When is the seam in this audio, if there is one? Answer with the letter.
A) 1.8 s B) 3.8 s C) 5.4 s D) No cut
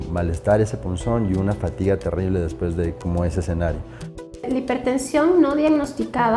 B